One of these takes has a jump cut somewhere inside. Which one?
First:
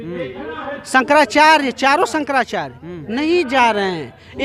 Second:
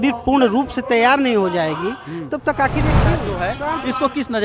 second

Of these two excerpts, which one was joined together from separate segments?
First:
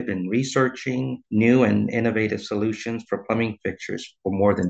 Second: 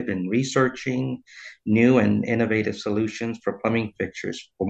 first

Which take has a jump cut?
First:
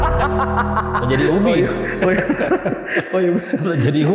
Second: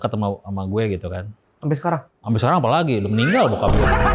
second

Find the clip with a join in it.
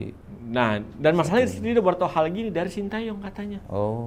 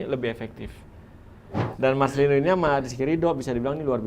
second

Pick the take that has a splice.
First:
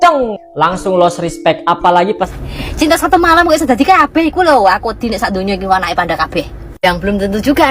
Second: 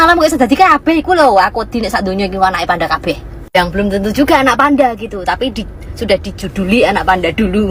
first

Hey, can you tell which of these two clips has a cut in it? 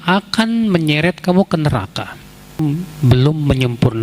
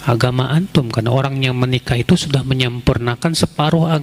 first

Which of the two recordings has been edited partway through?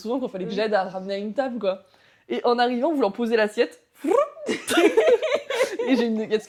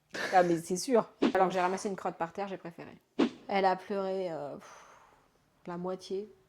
second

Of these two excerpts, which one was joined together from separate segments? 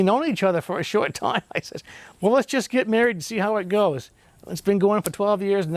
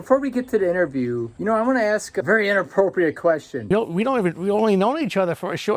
second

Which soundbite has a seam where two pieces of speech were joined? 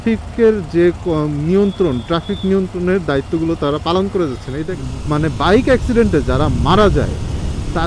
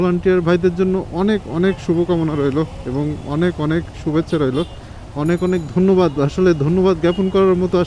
first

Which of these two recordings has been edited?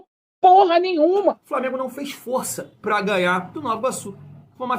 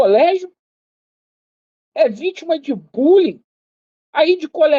first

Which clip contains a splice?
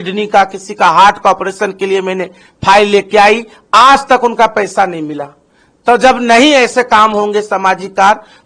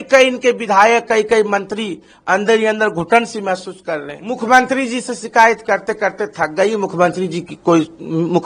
second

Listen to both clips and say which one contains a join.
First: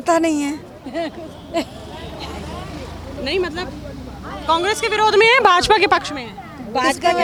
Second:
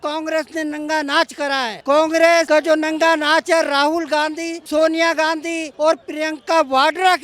second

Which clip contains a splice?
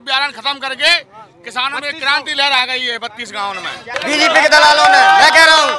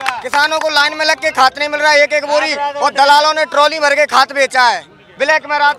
first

